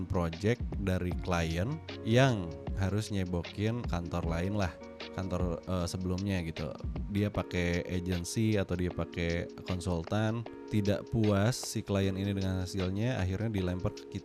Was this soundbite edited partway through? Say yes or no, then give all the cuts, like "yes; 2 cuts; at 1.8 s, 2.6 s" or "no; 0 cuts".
no; 0 cuts